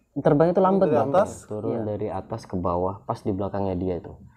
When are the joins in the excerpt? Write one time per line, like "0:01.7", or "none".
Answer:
0:01.4